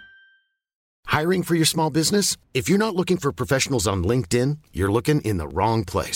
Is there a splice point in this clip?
yes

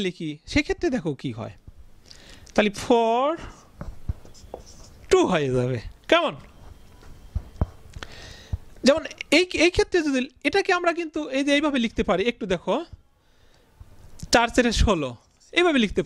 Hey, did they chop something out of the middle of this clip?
no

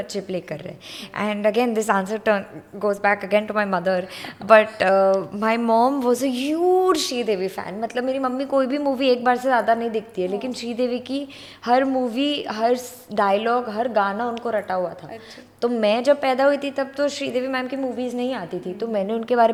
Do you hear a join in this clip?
no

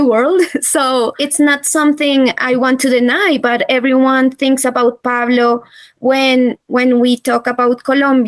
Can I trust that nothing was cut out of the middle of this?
no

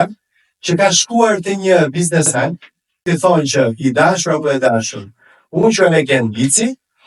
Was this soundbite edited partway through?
yes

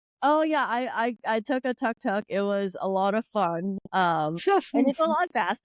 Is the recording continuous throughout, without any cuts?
yes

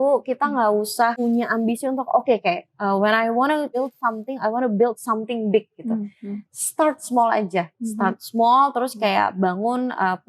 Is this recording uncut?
no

